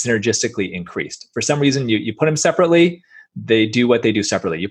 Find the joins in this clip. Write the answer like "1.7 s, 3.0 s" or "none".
none